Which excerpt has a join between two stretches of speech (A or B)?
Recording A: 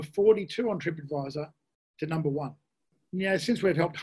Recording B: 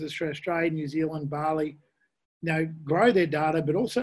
A